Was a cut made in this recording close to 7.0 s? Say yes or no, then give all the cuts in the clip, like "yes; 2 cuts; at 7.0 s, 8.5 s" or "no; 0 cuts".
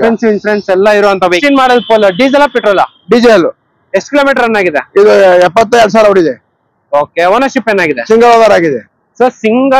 no; 1 cut; at 1.4 s